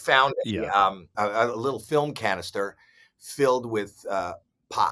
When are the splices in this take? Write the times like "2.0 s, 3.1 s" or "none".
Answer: 1.1 s